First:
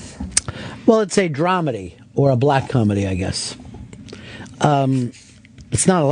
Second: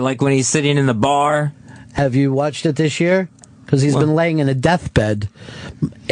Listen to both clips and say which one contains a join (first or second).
second